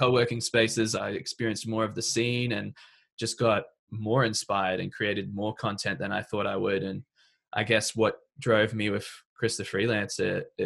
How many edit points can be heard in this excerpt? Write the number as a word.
one